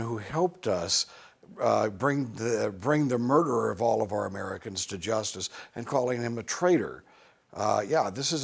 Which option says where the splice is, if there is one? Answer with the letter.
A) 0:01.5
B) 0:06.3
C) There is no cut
B